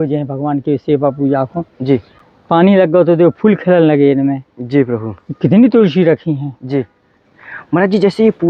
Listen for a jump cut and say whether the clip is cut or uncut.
uncut